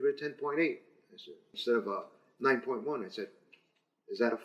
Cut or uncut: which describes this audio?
cut